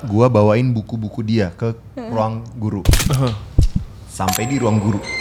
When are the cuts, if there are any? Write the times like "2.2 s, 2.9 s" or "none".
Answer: none